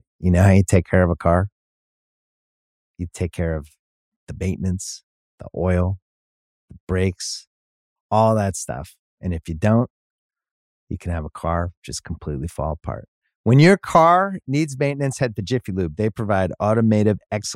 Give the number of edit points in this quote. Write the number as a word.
zero